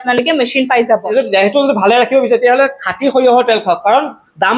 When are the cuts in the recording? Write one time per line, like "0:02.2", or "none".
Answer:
0:01.1